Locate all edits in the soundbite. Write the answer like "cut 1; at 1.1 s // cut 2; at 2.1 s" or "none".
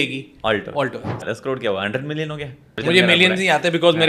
cut 1; at 1.2 s // cut 2; at 2.8 s